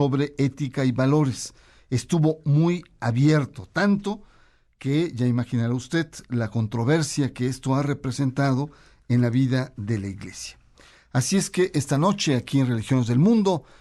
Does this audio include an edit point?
no; 0 cuts

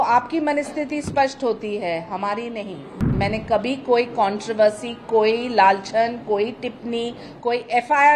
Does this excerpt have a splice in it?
yes; 1 cut; at 3.1 s

